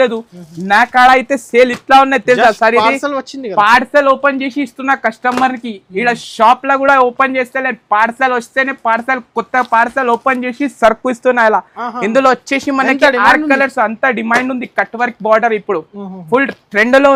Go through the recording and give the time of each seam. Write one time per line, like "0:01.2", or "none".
none